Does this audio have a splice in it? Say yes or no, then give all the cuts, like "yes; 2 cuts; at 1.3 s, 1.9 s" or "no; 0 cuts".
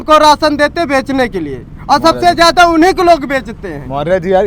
no; 0 cuts